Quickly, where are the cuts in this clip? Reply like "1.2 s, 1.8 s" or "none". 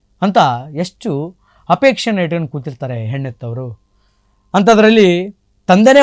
none